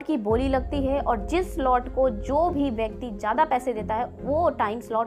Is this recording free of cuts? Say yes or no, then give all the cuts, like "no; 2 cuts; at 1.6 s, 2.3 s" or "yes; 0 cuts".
yes; 0 cuts